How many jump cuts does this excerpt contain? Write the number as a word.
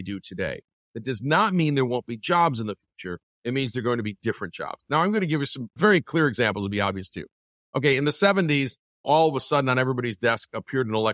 two